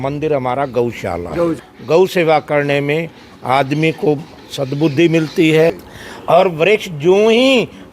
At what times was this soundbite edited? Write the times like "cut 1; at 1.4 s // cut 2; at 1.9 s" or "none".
cut 1; at 1.7 s // cut 2; at 5.9 s